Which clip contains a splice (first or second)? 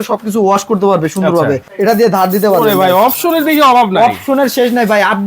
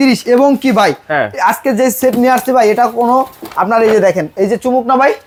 first